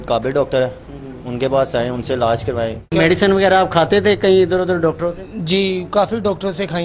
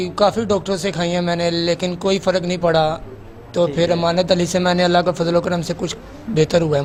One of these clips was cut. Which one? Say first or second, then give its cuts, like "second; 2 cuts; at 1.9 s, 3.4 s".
first; 1 cut; at 2.9 s